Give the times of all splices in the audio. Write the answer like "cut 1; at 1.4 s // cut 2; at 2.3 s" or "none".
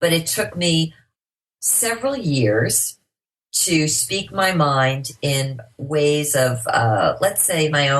cut 1; at 1.2 s